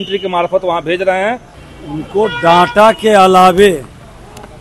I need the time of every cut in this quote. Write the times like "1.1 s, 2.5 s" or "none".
1.5 s